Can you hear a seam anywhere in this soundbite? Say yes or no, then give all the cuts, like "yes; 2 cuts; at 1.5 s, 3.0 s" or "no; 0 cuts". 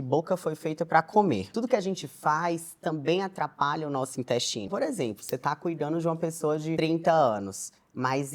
yes; 3 cuts; at 1.5 s, 4.7 s, 6.8 s